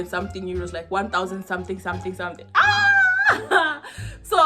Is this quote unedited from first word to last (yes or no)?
yes